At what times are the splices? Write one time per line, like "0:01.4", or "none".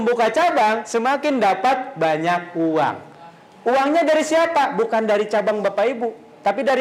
none